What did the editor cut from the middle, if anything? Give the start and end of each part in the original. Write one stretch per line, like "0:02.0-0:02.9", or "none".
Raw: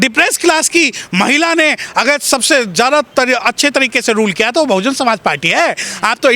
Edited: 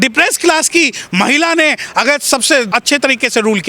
0:02.7-0:03.4